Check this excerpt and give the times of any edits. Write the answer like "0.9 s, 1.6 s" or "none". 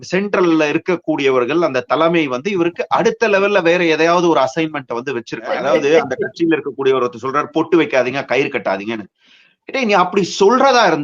5.6 s